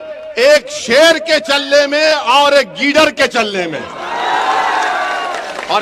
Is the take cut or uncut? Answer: uncut